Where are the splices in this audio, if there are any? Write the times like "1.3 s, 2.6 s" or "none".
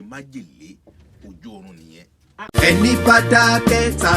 2.5 s